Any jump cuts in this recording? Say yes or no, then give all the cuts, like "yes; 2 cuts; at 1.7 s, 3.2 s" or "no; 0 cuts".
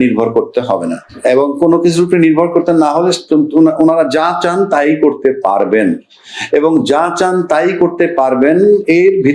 no; 0 cuts